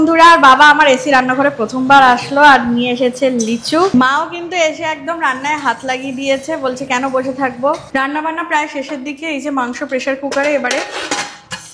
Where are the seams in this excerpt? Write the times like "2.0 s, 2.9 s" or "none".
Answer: 3.9 s, 7.8 s